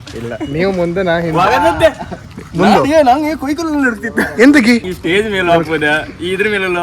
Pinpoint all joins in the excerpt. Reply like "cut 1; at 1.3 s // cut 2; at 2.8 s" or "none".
cut 1; at 4.9 s